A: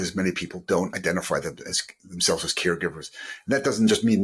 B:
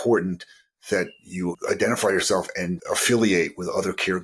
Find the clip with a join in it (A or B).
B